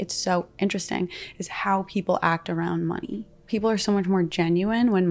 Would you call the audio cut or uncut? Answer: cut